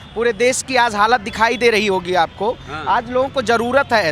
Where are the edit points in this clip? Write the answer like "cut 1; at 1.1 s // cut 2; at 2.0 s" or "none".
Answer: none